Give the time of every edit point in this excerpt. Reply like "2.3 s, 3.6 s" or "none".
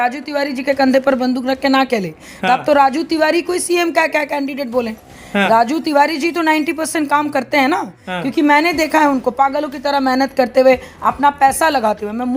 none